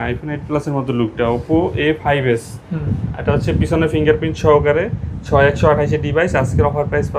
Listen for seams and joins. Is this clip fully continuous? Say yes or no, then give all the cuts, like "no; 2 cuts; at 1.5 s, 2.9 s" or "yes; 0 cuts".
yes; 0 cuts